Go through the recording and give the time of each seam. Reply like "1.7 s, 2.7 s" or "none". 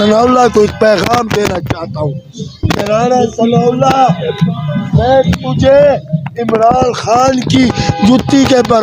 none